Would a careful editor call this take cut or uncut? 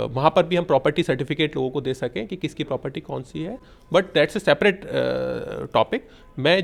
uncut